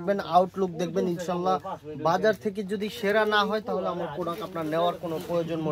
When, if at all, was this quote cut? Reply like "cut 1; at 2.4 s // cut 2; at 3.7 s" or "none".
none